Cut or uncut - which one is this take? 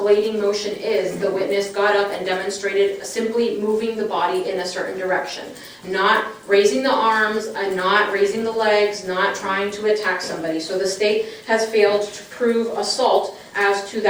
uncut